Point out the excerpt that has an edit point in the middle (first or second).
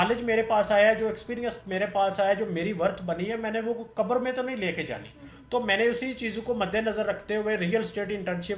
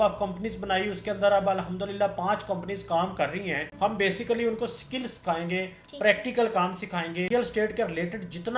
second